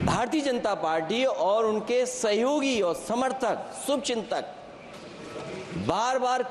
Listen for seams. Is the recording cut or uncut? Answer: uncut